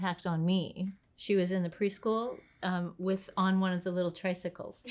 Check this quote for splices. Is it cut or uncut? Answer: cut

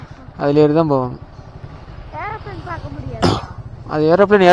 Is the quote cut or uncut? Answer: uncut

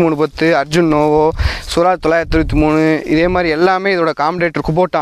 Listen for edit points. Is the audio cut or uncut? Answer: uncut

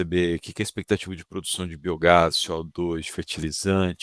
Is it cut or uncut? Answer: uncut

